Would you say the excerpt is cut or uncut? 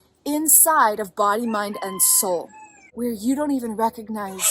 cut